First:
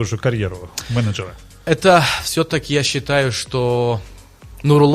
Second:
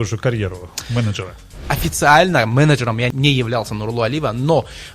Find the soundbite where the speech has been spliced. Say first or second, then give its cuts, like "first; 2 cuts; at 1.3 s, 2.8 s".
second; 2 cuts; at 1.6 s, 3.1 s